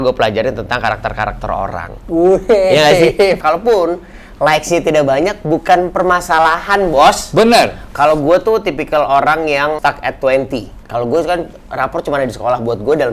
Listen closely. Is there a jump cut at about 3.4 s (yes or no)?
yes